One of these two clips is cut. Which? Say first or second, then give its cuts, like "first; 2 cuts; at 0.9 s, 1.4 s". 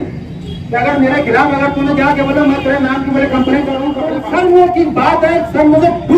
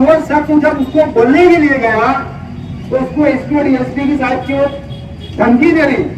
first; 1 cut; at 4.2 s